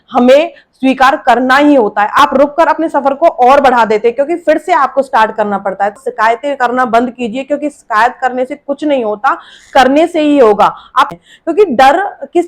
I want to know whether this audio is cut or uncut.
cut